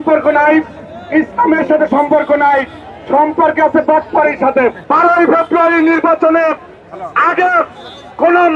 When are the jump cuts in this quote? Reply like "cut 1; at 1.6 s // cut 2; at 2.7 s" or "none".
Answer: cut 1; at 4.8 s